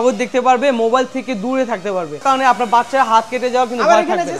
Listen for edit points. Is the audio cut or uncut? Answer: cut